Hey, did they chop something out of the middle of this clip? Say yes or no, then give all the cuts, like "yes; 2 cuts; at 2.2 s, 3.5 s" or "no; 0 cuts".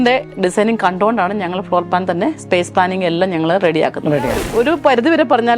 yes; 1 cut; at 4.4 s